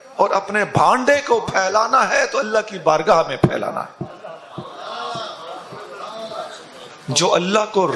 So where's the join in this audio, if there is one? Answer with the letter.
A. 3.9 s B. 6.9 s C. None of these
B